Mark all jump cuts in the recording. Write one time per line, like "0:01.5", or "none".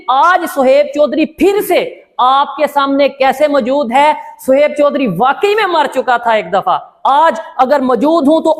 none